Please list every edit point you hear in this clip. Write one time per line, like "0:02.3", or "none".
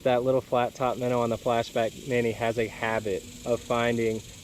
none